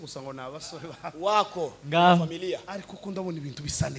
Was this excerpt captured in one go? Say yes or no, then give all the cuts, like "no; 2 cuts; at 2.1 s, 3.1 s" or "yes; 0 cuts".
yes; 0 cuts